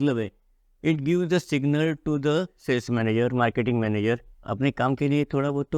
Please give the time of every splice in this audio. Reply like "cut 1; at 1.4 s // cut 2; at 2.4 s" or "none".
cut 1; at 4.4 s